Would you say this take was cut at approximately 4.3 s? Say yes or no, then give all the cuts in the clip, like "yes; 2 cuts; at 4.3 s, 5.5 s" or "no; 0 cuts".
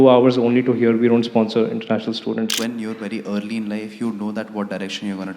no; 1 cut; at 2.5 s